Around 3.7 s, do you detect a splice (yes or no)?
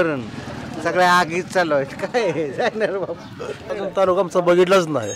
yes